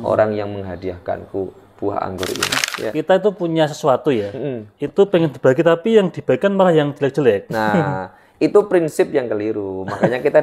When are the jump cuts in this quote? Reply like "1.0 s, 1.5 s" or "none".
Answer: 2.6 s